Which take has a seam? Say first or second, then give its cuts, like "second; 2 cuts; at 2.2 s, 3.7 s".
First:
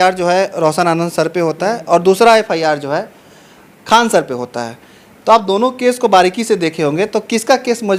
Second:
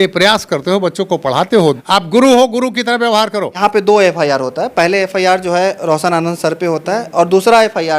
second; 2 cuts; at 1.8 s, 3.6 s